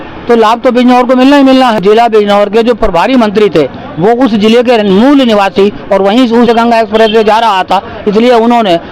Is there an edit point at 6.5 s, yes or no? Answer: yes